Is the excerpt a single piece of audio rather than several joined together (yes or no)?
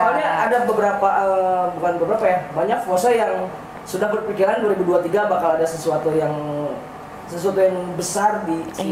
yes